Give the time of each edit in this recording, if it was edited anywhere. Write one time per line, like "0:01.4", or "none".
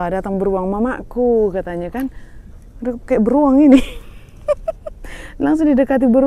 none